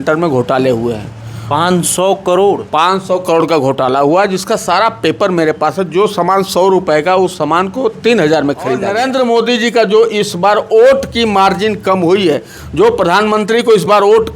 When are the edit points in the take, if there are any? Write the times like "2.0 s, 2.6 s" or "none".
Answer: 8.9 s